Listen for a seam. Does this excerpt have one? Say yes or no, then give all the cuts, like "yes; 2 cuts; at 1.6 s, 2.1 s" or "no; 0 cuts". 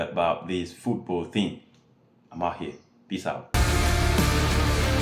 yes; 1 cut; at 3.5 s